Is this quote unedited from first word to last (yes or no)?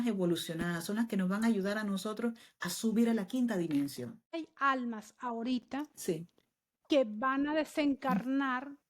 no